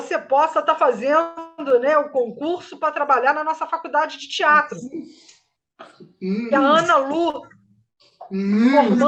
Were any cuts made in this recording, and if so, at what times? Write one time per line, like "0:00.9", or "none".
none